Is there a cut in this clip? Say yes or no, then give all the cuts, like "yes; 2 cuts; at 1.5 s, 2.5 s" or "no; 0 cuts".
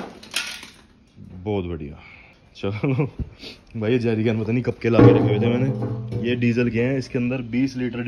no; 0 cuts